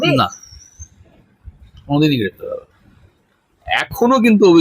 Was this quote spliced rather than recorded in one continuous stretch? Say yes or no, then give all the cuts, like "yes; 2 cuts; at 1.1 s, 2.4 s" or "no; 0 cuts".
yes; 1 cut; at 3.5 s